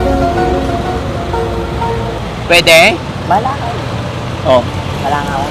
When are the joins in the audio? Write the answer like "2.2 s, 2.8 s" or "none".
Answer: none

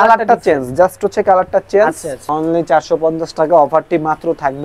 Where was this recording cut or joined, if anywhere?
2.2 s

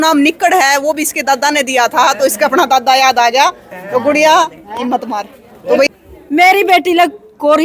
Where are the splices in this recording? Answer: 5.9 s

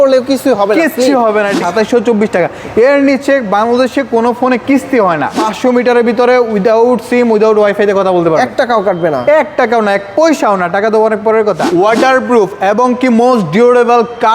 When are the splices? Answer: 1.5 s, 5.3 s, 11.6 s

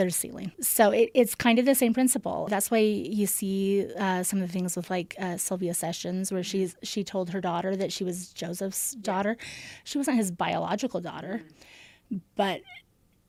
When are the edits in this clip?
none

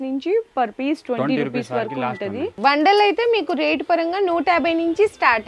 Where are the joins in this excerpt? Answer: 2.5 s

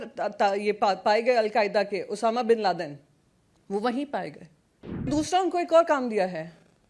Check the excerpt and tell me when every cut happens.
5.1 s

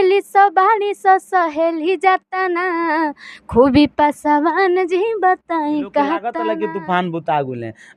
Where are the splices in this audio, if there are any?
6.3 s

